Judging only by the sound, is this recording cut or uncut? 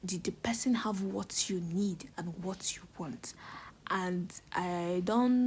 uncut